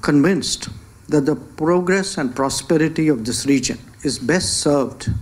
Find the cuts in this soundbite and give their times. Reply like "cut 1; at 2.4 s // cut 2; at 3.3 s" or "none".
cut 1; at 3.8 s